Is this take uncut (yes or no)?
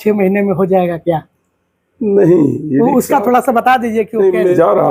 yes